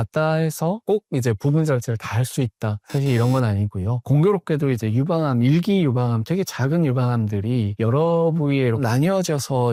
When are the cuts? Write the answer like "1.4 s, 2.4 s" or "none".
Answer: none